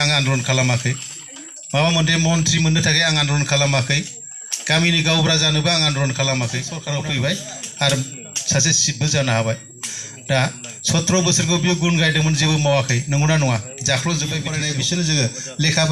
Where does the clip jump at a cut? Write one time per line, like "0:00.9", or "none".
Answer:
0:06.7
0:14.6